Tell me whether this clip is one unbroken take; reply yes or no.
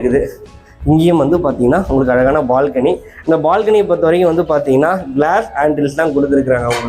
yes